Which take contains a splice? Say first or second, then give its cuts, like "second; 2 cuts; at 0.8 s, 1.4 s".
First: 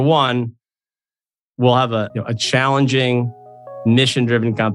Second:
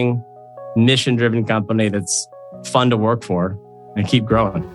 second; 1 cut; at 3.8 s